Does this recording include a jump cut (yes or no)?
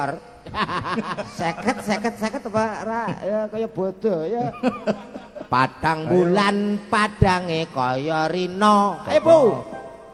no